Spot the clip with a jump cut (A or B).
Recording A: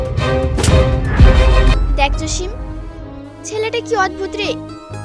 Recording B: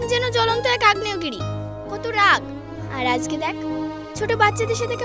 A